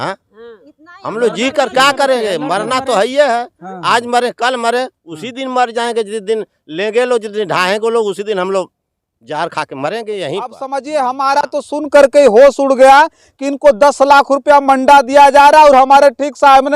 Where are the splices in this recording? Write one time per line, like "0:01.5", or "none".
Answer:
0:10.6